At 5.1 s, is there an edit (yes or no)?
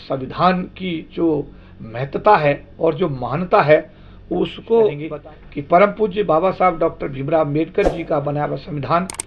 yes